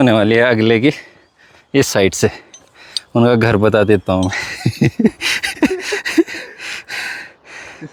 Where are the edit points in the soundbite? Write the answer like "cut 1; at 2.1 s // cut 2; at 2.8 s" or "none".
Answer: none